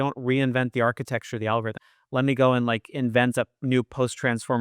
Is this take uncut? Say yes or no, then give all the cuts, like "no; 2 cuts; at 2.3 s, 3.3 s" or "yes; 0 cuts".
no; 1 cut; at 1.7 s